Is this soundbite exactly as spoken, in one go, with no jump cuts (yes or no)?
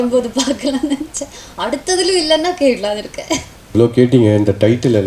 no